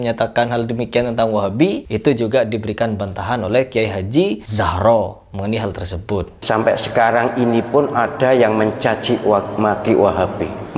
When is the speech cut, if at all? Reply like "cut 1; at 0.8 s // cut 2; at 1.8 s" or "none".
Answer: cut 1; at 1.9 s // cut 2; at 4.4 s // cut 3; at 6.3 s